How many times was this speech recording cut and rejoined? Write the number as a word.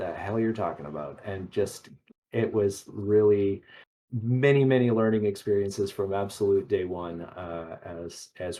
zero